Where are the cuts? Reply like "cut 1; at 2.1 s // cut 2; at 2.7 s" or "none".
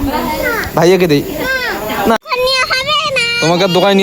cut 1; at 2.2 s